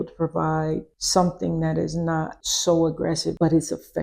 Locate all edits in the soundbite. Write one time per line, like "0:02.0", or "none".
none